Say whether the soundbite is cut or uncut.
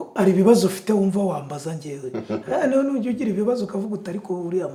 uncut